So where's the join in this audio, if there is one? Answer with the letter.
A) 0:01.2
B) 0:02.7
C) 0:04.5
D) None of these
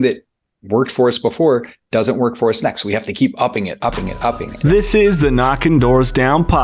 C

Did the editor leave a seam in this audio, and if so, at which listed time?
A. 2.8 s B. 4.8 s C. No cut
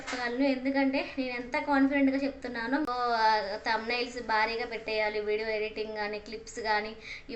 A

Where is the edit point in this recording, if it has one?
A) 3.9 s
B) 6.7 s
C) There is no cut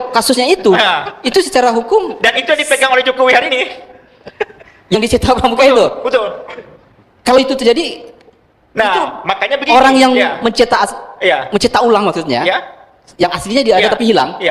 C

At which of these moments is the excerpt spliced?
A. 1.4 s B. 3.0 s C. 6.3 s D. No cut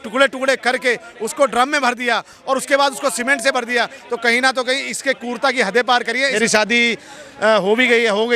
C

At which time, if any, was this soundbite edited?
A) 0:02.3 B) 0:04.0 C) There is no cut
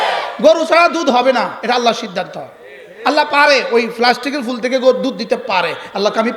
C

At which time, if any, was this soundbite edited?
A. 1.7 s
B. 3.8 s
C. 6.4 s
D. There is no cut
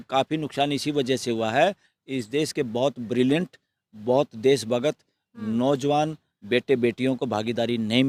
D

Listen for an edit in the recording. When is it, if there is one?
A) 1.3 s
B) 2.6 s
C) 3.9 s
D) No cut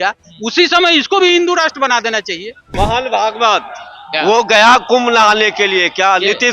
B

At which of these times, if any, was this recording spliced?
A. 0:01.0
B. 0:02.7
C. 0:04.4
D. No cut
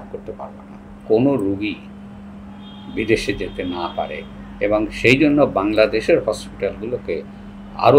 A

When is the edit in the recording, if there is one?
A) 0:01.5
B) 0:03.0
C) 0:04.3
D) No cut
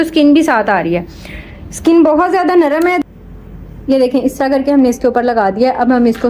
B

